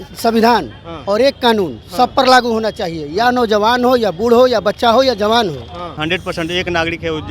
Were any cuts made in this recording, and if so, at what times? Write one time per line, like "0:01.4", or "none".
0:05.9